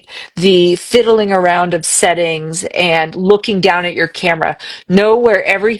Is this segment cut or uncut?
uncut